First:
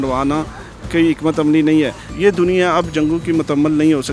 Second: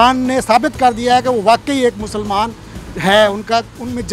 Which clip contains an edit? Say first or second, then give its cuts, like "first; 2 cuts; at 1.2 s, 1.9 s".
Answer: first; 1 cut; at 2.0 s